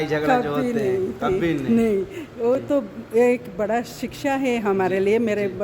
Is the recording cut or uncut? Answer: uncut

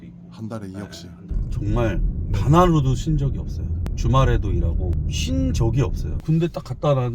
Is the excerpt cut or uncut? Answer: cut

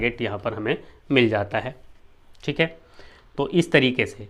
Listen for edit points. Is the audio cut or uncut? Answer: uncut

